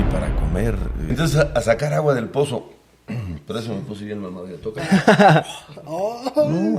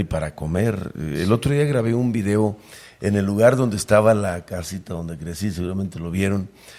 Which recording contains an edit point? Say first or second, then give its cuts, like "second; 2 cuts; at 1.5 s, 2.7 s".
first; 1 cut; at 1.1 s